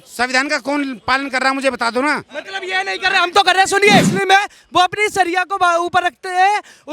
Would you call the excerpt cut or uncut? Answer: cut